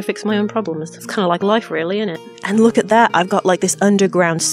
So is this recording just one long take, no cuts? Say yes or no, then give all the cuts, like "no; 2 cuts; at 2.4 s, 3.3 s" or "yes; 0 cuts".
no; 1 cut; at 2.2 s